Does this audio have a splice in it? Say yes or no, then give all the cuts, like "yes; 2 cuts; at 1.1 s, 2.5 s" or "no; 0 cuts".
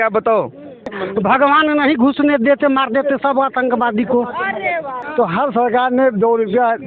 yes; 2 cuts; at 1.0 s, 5.0 s